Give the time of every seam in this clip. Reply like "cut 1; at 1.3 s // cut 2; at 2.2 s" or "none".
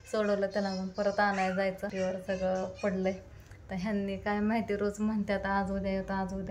cut 1; at 1.9 s